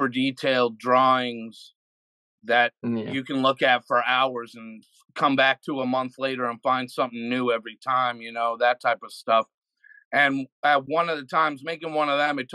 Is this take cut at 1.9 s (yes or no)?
no